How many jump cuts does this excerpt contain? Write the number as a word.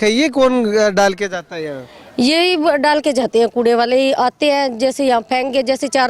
zero